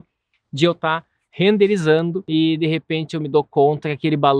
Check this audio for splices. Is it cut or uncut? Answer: cut